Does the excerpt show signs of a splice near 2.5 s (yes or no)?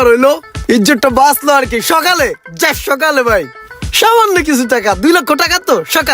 no